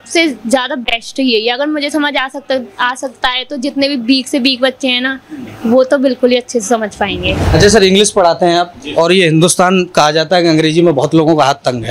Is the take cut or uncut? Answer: cut